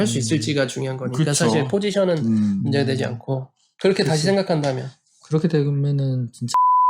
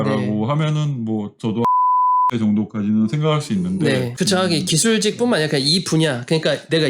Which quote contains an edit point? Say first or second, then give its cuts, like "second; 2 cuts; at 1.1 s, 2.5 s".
second; 1 cut; at 4.1 s